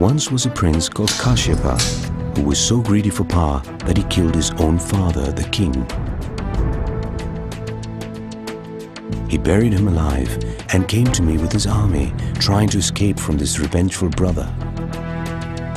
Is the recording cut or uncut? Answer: cut